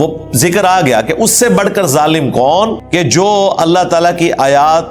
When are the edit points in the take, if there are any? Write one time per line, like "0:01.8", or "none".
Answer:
0:02.8

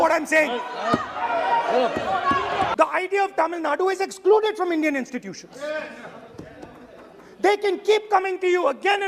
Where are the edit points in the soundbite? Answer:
0:02.7

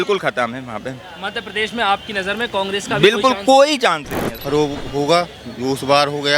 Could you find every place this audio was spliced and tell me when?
0:04.3

